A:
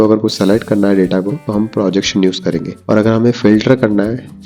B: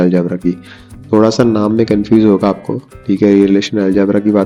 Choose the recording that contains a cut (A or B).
A